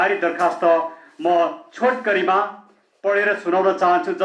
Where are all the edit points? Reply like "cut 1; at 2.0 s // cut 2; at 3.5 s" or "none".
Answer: none